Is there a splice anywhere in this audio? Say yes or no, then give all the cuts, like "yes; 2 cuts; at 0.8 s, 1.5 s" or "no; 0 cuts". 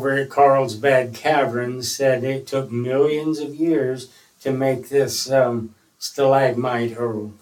no; 0 cuts